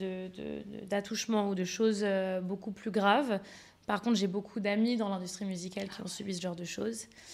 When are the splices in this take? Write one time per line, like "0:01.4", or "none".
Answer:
none